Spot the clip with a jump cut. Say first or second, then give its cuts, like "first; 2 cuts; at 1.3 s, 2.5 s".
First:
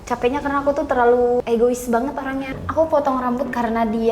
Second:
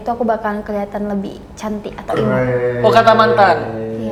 first; 2 cuts; at 1.4 s, 2.5 s